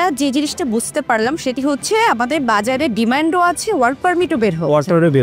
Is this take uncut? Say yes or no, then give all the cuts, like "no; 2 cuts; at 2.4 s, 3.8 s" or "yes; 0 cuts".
yes; 0 cuts